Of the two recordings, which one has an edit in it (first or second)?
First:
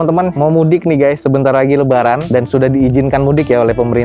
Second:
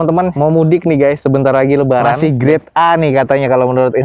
second